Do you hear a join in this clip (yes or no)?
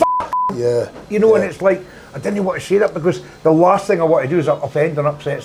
no